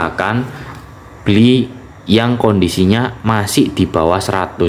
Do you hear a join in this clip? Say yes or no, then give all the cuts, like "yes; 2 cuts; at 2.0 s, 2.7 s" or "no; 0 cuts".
no; 0 cuts